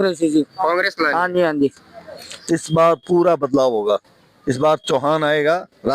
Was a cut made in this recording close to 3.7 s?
no; 1 cut; at 2.3 s

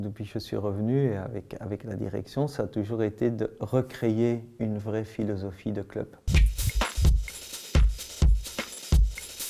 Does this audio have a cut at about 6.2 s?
yes; 1 cut; at 6.2 s

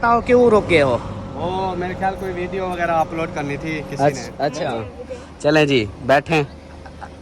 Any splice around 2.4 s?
no; 1 cut; at 4.6 s

